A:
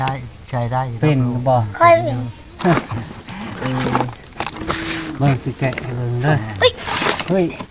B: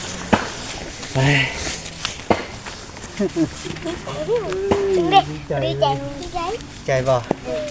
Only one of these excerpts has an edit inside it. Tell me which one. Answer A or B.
A